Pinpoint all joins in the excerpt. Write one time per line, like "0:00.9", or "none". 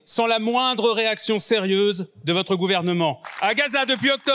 0:03.3